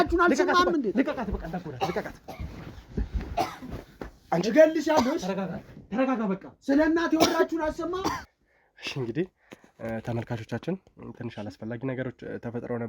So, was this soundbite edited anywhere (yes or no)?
no